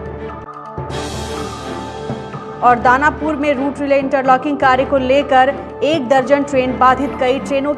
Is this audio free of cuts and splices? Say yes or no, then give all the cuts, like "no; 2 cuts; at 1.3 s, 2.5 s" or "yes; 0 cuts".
no; 1 cut; at 2.5 s